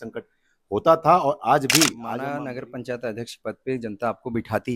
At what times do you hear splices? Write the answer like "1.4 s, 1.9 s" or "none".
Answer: 2.2 s